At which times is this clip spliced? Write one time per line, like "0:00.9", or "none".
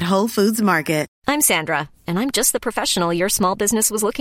0:01.1